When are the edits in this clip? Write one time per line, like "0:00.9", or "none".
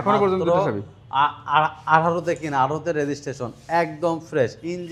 none